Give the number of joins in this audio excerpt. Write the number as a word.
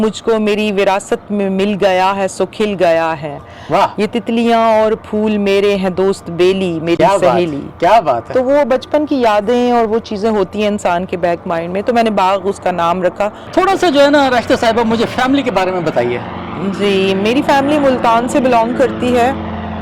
zero